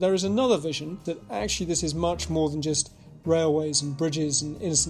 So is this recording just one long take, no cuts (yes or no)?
no